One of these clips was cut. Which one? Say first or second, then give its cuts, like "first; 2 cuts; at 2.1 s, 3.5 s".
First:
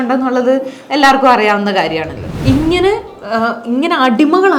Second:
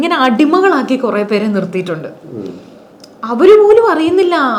first; 1 cut; at 2.3 s